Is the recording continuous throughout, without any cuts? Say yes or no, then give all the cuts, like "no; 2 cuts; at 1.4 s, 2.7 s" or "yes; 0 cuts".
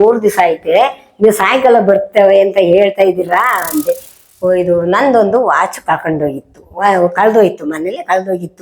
no; 1 cut; at 4.1 s